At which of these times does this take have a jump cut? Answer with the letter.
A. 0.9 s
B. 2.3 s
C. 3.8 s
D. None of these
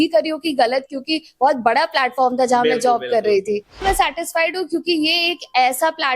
C